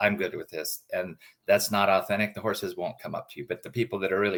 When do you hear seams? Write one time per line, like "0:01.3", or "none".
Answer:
none